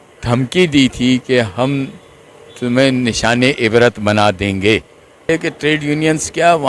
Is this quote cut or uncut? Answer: cut